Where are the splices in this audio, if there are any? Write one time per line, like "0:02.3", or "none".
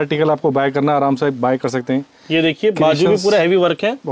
none